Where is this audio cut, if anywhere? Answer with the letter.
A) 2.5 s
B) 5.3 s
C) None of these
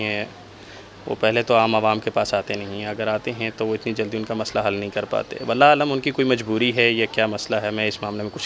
C